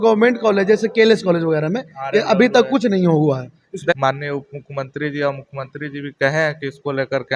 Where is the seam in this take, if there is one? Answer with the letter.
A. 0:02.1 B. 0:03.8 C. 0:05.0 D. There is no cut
B